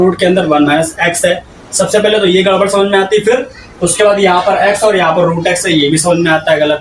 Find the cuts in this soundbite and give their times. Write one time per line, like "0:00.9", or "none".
none